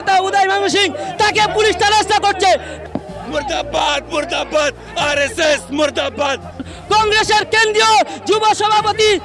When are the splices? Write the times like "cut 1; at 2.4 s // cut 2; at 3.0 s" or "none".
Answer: cut 1; at 2.8 s // cut 2; at 6.7 s